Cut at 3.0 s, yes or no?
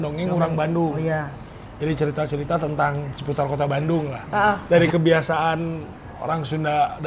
no